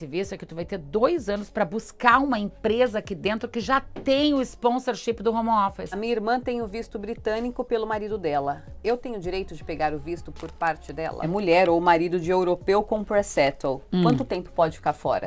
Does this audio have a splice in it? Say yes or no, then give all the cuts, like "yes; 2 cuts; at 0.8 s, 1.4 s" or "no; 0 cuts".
yes; 2 cuts; at 6.0 s, 11.3 s